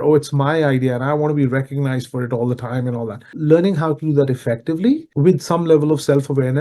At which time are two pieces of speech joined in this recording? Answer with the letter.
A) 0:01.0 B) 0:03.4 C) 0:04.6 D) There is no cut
B